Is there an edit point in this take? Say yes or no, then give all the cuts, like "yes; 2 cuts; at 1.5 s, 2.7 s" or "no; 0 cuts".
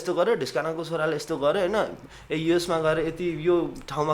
no; 0 cuts